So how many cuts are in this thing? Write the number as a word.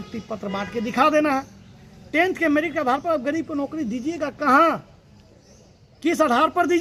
zero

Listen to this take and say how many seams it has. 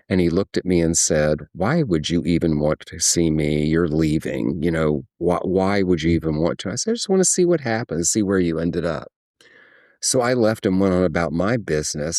zero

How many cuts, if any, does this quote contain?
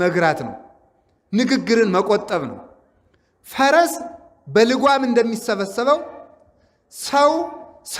zero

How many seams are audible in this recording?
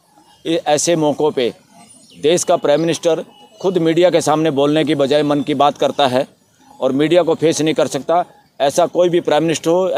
zero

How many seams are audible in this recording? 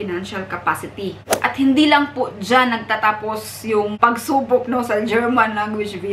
two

